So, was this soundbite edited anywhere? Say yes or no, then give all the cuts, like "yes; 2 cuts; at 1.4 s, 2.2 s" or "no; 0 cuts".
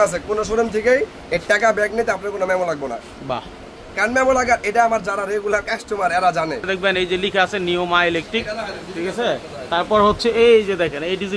yes; 1 cut; at 6.7 s